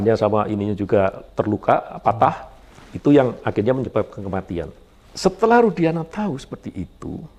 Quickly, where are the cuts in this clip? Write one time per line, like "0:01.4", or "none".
none